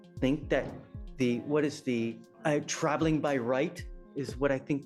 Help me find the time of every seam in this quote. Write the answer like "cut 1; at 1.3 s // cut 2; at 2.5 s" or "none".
cut 1; at 2.3 s

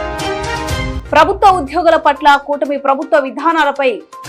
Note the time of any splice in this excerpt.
cut 1; at 1.0 s

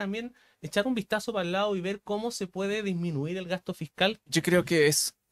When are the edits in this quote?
cut 1; at 4.2 s

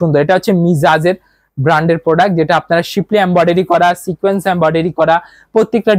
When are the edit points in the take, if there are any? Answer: none

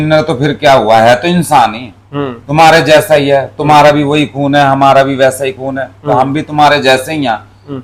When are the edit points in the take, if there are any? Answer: none

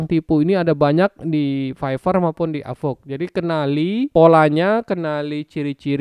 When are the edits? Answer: cut 1; at 4.1 s

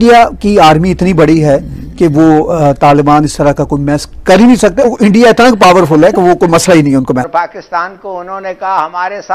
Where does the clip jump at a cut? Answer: cut 1; at 4.8 s // cut 2; at 7.3 s

